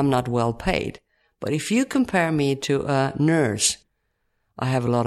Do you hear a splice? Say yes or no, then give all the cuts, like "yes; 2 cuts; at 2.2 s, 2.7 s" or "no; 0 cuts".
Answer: yes; 1 cut; at 3.8 s